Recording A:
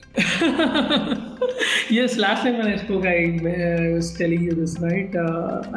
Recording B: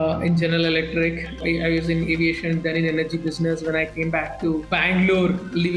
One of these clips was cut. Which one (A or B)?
B